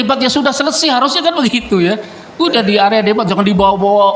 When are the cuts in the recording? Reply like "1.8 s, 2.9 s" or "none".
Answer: none